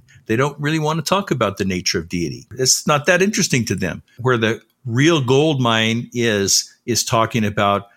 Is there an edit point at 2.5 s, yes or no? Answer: yes